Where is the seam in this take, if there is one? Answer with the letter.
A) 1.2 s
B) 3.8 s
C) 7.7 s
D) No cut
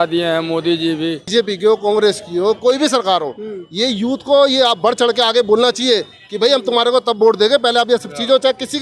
A